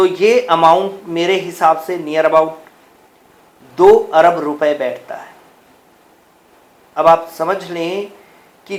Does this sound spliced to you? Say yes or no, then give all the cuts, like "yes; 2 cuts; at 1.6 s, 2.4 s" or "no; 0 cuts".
no; 0 cuts